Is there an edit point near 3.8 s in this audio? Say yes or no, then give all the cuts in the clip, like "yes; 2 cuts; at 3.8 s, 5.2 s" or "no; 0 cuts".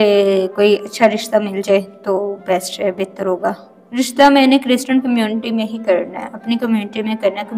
yes; 1 cut; at 3.8 s